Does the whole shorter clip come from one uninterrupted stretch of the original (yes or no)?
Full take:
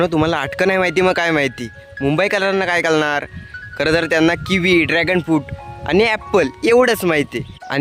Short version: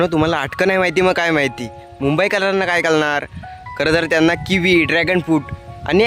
yes